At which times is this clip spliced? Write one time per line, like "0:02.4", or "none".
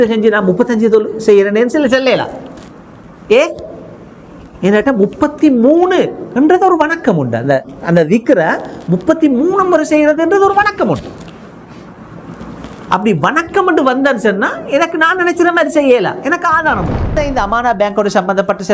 0:17.1

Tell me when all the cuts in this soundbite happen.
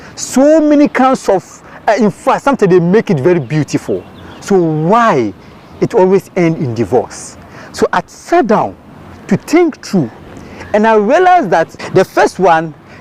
0:11.8

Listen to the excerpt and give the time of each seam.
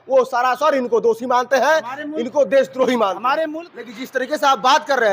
0:03.5

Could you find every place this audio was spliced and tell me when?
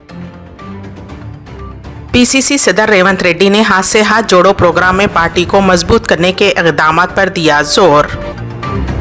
0:01.7

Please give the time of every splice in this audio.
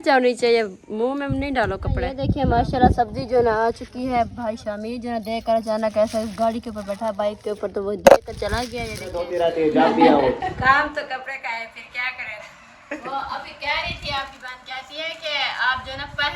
0:02.0
0:09.3

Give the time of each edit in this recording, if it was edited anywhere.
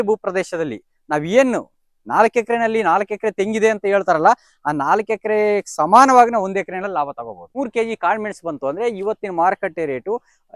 0:07.4

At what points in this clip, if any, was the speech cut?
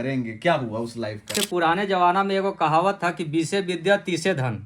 0:01.3

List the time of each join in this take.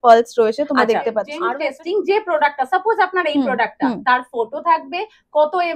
0:01.4

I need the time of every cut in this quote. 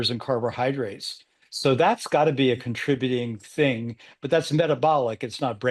none

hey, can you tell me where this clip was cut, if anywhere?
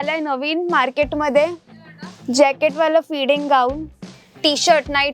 0:04.1

